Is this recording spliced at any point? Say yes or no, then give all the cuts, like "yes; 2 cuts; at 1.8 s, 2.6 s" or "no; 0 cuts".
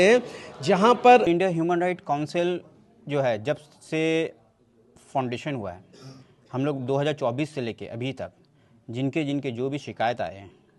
yes; 1 cut; at 1.3 s